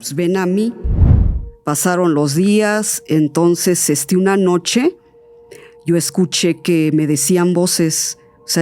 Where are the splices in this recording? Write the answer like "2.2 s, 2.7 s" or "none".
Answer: 1.2 s